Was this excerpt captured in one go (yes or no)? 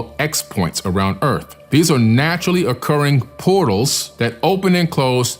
no